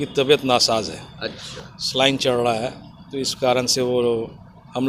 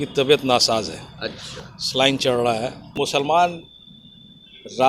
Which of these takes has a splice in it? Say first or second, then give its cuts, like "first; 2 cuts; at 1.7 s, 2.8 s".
second; 1 cut; at 2.9 s